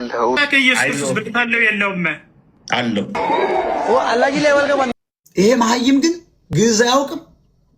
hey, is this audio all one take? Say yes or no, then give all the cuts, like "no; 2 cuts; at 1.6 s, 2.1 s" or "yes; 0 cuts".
no; 1 cut; at 4.9 s